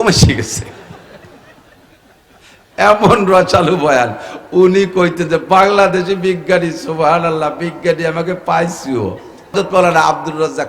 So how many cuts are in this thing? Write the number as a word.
one